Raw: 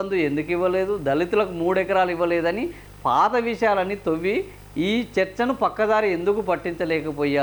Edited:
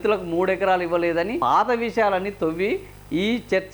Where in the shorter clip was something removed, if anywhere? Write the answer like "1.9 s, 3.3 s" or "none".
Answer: 1.4 s